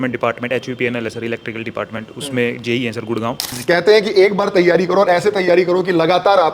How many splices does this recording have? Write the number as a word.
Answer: one